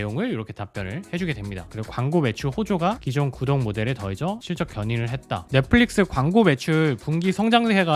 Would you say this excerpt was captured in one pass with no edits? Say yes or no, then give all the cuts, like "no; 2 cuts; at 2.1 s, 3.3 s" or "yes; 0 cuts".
no; 2 cuts; at 1.7 s, 5.3 s